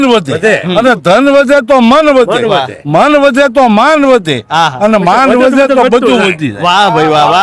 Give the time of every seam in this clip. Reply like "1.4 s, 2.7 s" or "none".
none

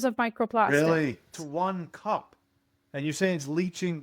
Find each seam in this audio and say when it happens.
1.4 s

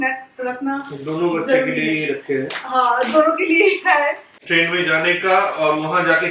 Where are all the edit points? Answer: 4.3 s

